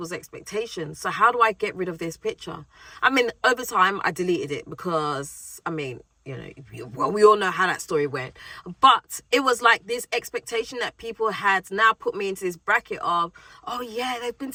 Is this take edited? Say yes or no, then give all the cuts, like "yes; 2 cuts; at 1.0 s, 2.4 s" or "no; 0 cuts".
no; 0 cuts